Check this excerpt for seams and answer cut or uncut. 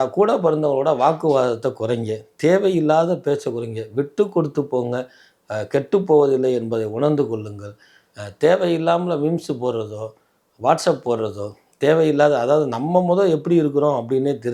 uncut